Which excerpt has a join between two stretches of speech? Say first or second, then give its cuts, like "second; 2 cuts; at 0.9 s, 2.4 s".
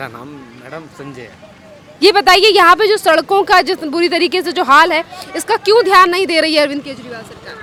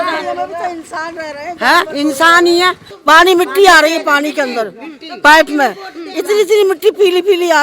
second; 1 cut; at 2.9 s